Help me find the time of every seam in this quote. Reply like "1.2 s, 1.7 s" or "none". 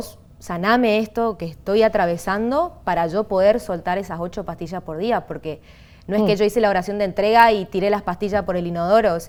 none